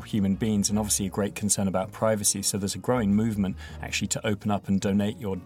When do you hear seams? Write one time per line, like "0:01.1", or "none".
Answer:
none

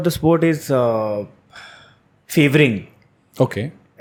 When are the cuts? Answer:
none

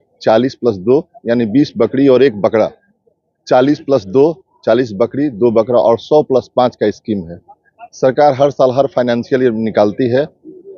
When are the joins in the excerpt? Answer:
none

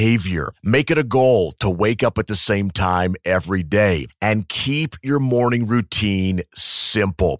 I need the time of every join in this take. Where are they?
none

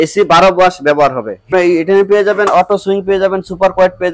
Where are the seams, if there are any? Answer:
0:01.5

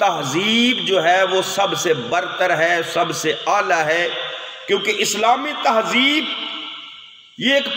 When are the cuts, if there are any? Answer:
none

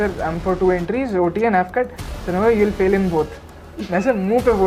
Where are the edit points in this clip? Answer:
none

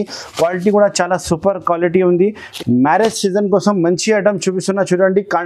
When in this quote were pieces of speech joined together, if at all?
0:02.5

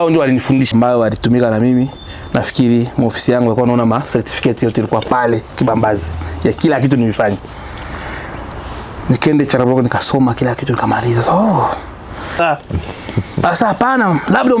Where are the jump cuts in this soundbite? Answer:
0:00.7
0:12.4

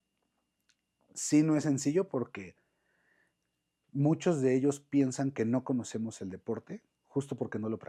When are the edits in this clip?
none

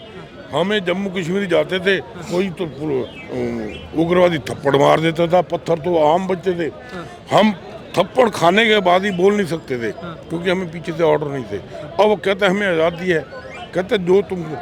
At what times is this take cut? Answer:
none

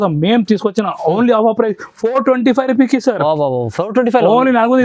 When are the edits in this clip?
none

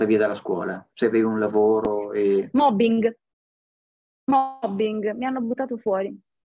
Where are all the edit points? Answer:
none

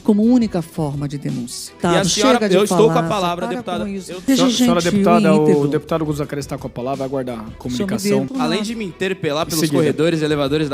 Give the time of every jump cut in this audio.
0:01.7
0:04.1
0:08.3

